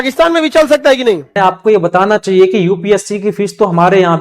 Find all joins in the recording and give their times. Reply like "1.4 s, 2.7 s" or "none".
1.4 s